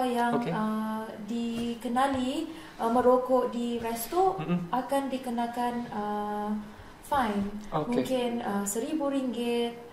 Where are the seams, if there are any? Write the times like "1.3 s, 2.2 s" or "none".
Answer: none